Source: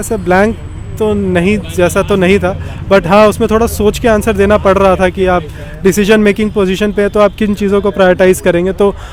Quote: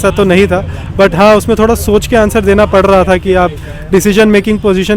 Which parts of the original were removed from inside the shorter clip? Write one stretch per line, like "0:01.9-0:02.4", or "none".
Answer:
none